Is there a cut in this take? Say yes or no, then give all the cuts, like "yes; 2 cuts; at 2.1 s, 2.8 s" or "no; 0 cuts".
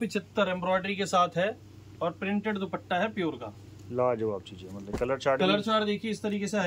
no; 0 cuts